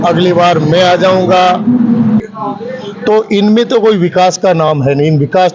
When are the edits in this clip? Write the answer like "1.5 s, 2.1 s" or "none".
2.2 s